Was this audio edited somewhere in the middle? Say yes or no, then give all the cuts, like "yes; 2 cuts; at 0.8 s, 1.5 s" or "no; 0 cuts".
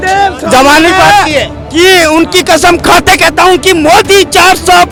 no; 0 cuts